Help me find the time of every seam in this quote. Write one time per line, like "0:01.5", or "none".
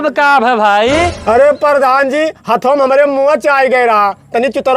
0:01.1